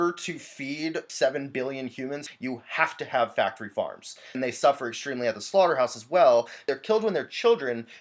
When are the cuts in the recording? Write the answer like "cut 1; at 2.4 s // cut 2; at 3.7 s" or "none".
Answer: cut 1; at 1.1 s // cut 2; at 2.2 s // cut 3; at 4.4 s // cut 4; at 6.7 s

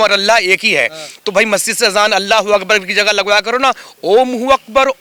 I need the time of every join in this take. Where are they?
none

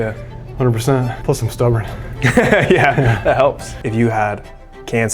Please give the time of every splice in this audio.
cut 1; at 1.2 s // cut 2; at 3.7 s

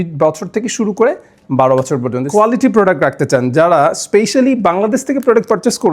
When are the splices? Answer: cut 1; at 2.2 s

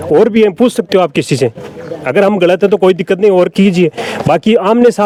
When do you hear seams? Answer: none

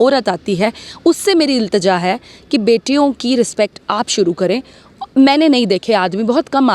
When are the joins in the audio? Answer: none

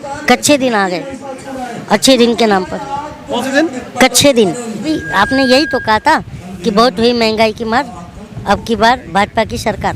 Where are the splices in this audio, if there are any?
cut 1; at 4.9 s

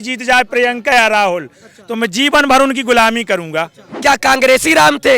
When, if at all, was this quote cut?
cut 1; at 3.8 s

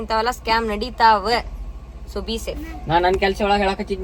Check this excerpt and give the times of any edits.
none

